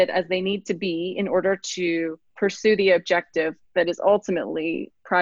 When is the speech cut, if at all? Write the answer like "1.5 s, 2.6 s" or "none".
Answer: 2.2 s